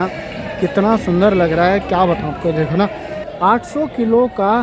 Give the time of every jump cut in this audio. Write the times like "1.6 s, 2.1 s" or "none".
3.1 s